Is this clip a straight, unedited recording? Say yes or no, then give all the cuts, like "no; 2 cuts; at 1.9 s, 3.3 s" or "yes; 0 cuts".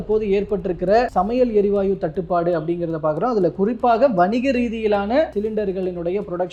yes; 0 cuts